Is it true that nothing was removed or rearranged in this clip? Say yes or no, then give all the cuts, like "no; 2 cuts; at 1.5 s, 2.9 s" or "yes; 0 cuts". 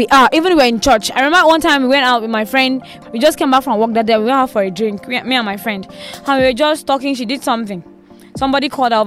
no; 1 cut; at 2.9 s